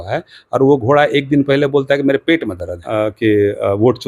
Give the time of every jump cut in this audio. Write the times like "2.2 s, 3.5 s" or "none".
2.8 s